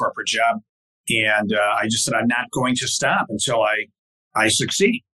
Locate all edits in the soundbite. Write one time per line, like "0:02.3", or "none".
none